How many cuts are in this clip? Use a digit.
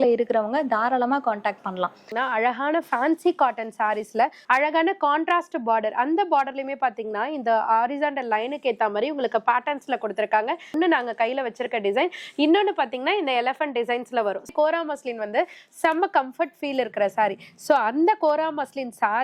4